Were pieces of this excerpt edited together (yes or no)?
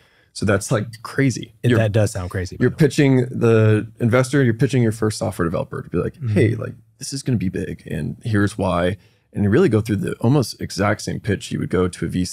yes